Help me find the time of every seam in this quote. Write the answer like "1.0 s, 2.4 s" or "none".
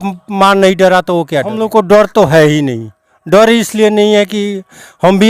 1.6 s